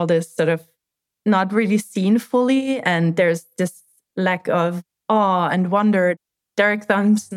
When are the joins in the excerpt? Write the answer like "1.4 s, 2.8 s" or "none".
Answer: 6.1 s